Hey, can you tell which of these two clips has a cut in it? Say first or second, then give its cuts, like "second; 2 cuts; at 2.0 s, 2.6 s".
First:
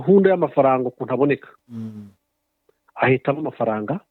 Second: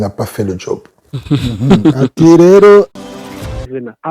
second; 1 cut; at 3.1 s